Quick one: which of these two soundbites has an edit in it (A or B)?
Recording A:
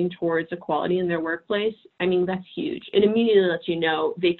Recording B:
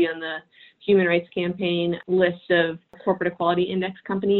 B